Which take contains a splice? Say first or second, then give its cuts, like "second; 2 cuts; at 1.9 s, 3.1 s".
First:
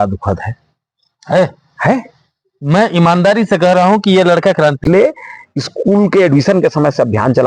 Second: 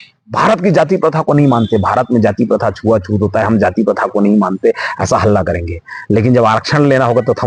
first; 1 cut; at 4.8 s